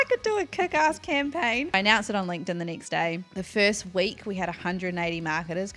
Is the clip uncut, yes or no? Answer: no